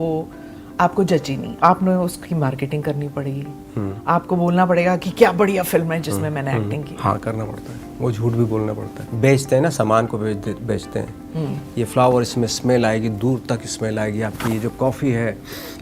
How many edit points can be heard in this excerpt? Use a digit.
3